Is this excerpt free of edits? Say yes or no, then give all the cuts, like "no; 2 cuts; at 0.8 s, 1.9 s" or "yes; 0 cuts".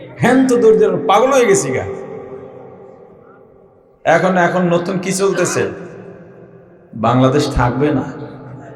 yes; 0 cuts